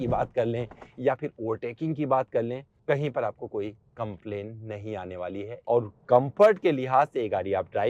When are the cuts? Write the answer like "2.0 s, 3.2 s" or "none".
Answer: 2.7 s, 5.5 s